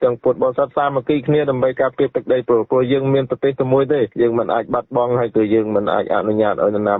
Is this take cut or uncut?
uncut